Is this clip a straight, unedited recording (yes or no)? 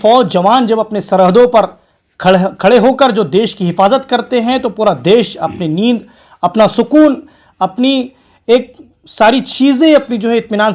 yes